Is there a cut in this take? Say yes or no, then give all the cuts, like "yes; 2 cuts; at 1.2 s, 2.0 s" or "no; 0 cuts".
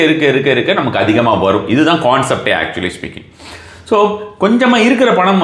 no; 0 cuts